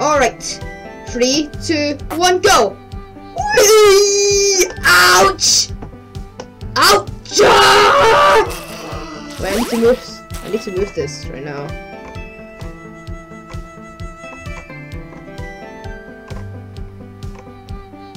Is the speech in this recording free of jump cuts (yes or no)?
yes